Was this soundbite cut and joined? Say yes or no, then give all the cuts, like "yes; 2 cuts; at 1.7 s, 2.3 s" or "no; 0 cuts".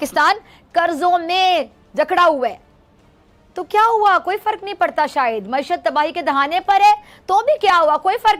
no; 0 cuts